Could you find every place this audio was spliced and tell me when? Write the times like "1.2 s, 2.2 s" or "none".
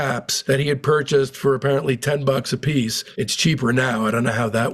3.0 s